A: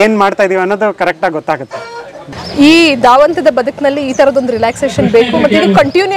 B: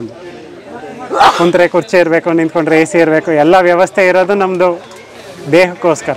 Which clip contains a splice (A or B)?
A